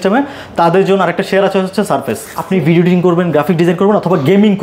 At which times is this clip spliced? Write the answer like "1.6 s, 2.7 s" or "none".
2.3 s